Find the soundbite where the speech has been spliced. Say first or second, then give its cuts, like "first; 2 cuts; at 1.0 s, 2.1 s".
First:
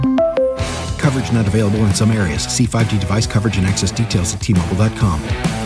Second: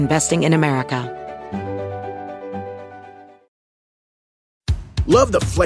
second; 1 cut; at 1.1 s